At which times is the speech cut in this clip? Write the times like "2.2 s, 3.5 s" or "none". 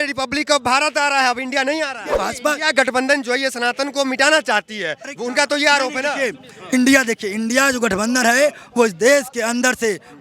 2.3 s

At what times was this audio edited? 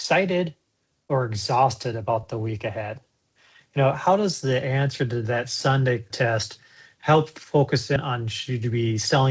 6.1 s, 8.0 s

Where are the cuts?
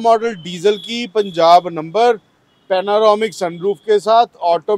none

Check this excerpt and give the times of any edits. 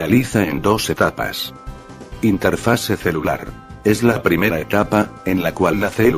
5.0 s

